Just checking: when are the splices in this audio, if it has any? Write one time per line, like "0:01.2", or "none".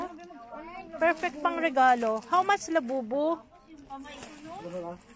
none

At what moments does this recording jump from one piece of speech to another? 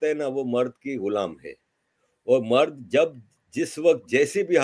none

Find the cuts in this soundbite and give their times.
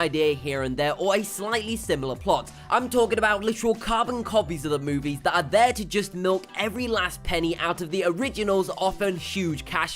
0:01.7

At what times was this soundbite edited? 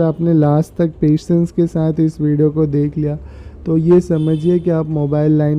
none

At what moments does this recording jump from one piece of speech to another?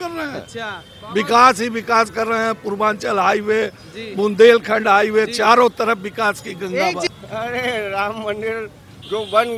0:07.1

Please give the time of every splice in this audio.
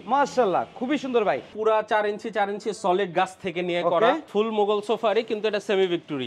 0:01.5
0:04.3

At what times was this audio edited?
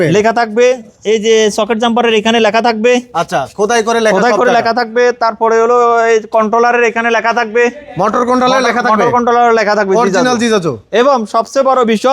none

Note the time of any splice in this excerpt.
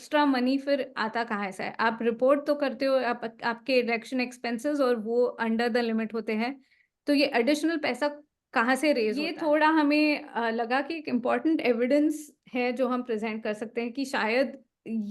0:09.3

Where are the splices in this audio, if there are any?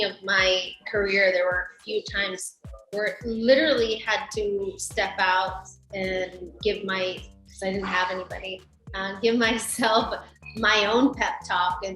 none

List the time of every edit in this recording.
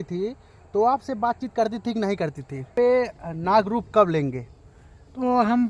0:02.7

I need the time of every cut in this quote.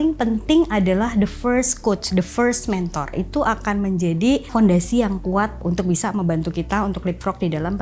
0:03.2
0:04.5
0:05.6

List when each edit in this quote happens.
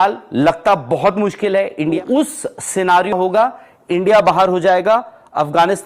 0:02.0

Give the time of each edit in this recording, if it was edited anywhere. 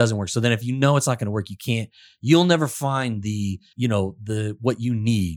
0:03.6

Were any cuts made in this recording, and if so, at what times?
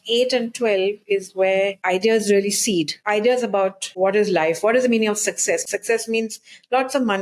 0:01.8
0:03.0
0:03.8
0:05.6

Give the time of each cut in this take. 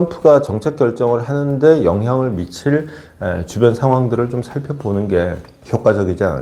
0:05.5

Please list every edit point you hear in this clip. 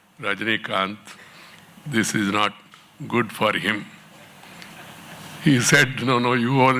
none

